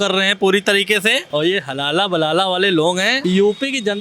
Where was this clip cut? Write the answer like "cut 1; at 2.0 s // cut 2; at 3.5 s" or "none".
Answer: cut 1; at 1.2 s // cut 2; at 3.2 s